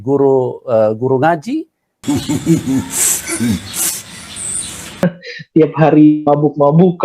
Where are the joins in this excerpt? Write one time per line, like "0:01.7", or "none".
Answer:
0:05.0